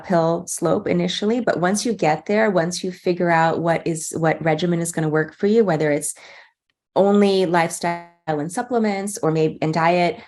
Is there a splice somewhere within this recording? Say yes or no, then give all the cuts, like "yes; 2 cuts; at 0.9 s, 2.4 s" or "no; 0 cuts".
no; 0 cuts